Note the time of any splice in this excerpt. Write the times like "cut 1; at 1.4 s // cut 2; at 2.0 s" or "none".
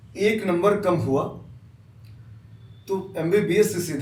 none